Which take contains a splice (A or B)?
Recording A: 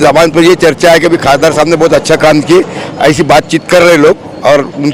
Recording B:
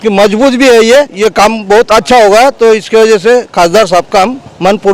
B